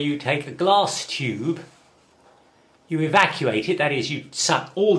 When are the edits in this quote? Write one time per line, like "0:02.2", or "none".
0:01.0